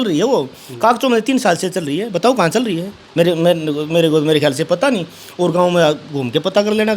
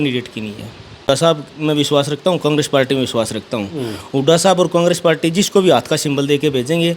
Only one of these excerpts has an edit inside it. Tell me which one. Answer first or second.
second